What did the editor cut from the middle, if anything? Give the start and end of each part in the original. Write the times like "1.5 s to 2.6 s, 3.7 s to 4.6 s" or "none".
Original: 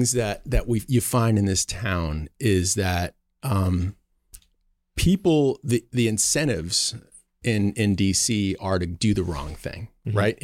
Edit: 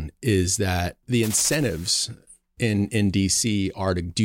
3.2 s to 5.9 s